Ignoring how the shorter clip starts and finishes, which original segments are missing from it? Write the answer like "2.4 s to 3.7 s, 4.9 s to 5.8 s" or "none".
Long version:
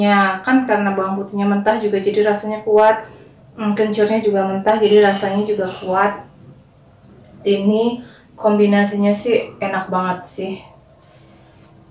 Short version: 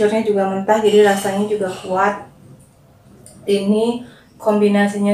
none